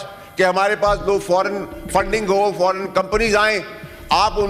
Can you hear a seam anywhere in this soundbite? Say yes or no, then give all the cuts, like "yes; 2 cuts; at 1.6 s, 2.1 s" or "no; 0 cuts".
no; 0 cuts